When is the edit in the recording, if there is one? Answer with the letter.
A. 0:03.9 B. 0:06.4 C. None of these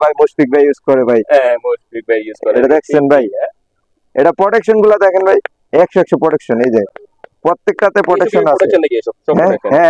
C